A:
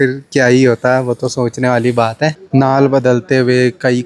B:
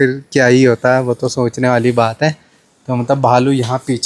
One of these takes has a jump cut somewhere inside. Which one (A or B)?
A